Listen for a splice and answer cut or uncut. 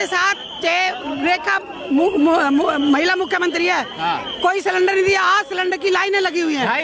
uncut